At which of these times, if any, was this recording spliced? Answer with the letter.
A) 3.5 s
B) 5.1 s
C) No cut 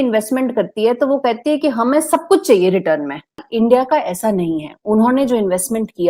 A